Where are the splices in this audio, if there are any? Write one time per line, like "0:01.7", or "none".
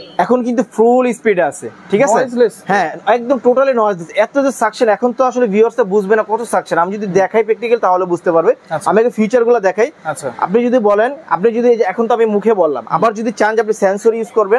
none